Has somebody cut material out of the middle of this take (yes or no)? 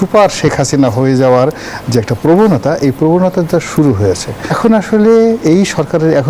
yes